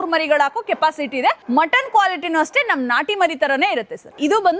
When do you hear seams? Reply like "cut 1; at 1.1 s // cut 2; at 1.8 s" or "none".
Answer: cut 1; at 1.4 s